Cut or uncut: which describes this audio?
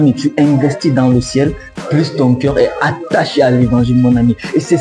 uncut